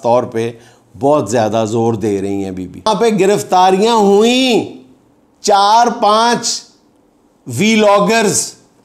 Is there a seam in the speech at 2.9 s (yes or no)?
yes